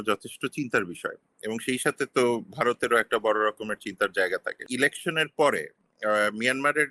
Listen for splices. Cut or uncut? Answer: cut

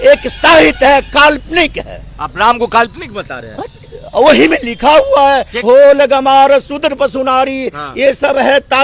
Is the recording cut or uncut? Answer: cut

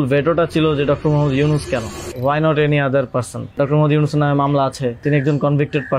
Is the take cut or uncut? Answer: cut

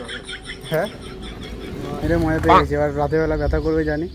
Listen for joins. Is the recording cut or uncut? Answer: cut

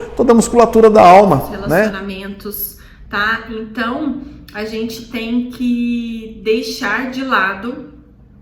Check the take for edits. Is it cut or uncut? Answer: cut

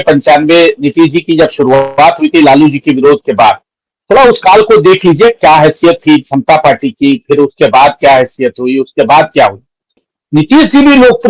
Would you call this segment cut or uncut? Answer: uncut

